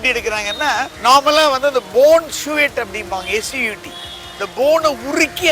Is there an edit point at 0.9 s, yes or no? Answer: yes